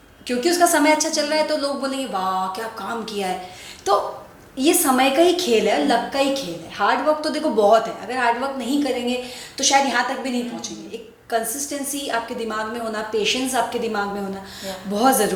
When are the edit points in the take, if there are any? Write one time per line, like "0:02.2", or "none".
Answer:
none